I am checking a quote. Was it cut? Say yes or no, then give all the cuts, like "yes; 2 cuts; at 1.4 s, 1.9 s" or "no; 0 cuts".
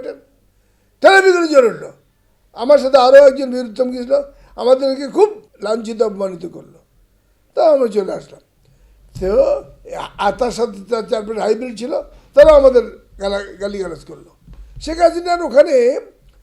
yes; 1 cut; at 5.5 s